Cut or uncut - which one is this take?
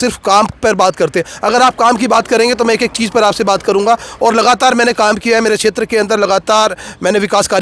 uncut